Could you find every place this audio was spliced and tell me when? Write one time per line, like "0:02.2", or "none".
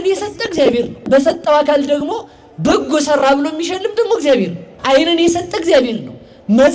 0:01.0
0:04.7